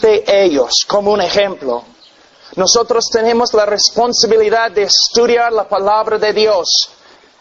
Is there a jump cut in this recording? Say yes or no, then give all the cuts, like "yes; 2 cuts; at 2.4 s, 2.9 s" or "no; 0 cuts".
no; 0 cuts